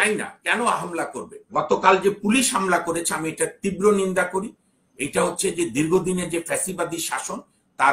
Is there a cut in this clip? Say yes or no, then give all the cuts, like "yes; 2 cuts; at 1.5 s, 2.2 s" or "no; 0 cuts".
yes; 1 cut; at 1.5 s